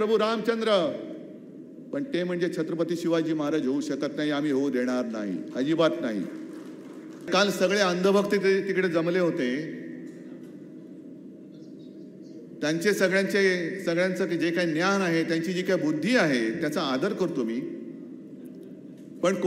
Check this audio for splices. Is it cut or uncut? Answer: cut